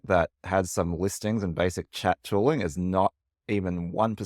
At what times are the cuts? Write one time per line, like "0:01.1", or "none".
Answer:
none